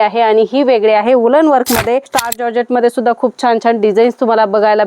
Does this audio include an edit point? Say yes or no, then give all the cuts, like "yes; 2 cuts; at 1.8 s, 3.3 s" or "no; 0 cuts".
yes; 1 cut; at 2.1 s